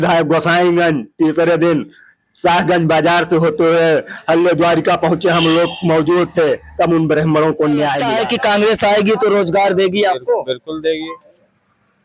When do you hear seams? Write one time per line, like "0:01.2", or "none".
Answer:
0:08.0